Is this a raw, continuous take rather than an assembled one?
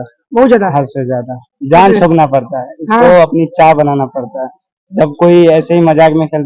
yes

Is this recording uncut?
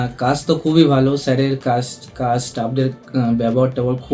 yes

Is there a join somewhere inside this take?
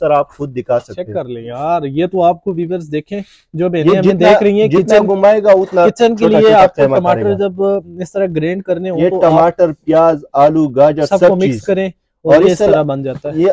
no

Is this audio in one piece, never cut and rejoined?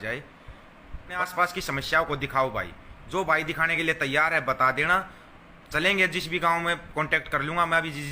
no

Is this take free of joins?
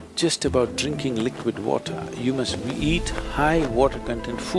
yes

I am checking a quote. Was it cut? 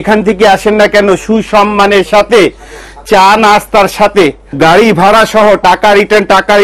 no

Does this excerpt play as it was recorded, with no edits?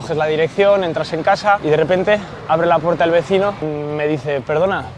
no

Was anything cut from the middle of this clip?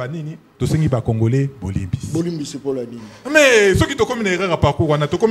no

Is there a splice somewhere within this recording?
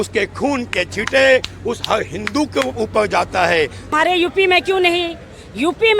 yes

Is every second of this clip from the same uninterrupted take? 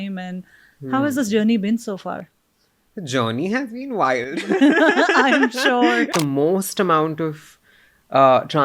no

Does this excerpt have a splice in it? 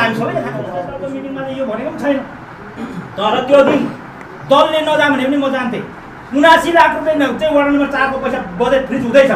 yes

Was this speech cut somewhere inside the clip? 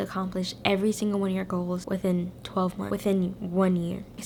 no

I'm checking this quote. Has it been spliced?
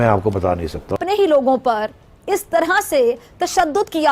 yes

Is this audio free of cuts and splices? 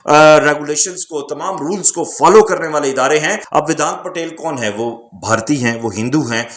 no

